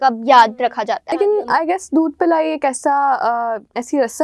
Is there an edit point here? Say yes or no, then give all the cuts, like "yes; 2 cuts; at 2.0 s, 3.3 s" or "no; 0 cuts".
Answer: yes; 1 cut; at 1.2 s